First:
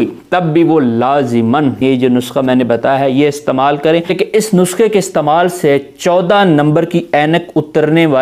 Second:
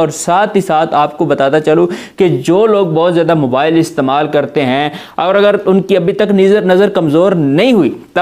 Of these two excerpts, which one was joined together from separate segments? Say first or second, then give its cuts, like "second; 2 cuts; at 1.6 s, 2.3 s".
first; 2 cuts; at 1.8 s, 4.1 s